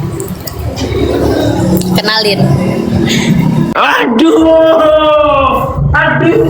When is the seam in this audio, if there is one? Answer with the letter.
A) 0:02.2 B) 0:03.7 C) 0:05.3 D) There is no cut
B